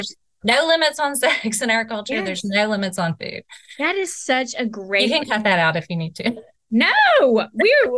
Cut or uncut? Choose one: uncut